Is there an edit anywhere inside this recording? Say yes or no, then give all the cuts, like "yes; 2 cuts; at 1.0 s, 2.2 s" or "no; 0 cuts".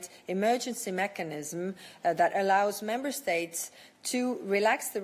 no; 0 cuts